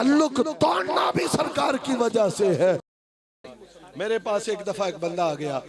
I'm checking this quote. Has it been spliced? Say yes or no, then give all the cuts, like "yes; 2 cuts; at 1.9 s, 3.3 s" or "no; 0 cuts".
yes; 1 cut; at 3.1 s